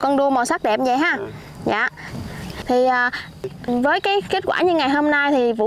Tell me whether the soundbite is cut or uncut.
uncut